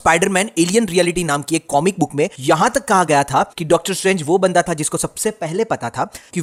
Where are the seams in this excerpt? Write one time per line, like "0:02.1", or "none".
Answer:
none

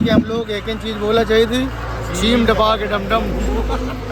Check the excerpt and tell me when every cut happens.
none

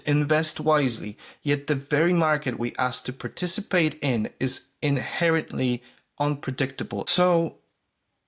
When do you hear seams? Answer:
0:07.1

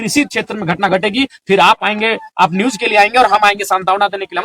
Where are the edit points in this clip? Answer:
none

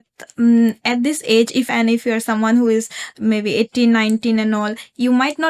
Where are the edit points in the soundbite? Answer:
0:01.7

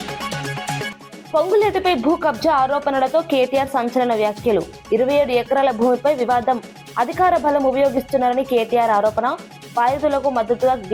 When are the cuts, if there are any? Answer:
0:01.0

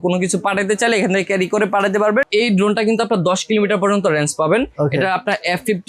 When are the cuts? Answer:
0:02.3

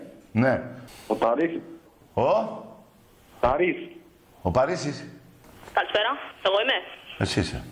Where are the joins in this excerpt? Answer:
0:01.6

